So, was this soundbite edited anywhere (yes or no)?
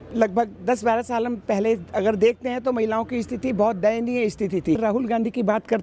yes